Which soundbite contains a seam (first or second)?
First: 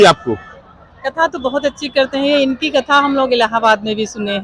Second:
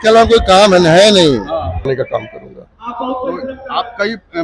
second